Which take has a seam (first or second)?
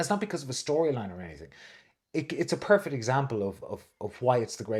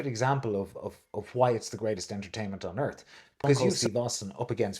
second